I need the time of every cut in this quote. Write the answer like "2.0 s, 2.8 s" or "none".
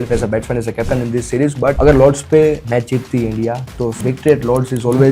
1.8 s, 2.6 s, 4.0 s